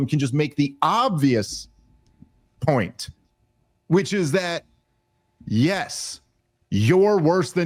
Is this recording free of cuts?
yes; 0 cuts

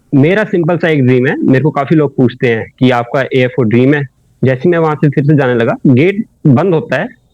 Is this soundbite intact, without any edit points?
no; 1 cut; at 4.2 s

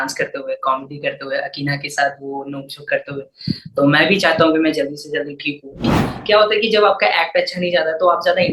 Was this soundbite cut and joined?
yes; 1 cut; at 5.8 s

